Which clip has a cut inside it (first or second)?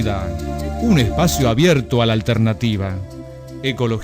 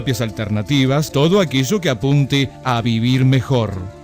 second